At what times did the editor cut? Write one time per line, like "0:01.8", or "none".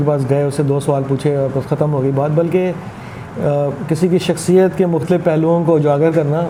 none